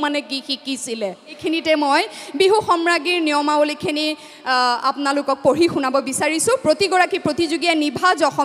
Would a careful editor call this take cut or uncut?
cut